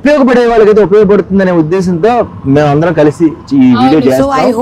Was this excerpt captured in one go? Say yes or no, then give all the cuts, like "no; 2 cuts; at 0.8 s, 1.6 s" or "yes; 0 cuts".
yes; 0 cuts